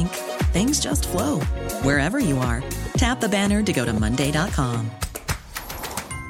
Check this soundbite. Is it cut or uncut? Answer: uncut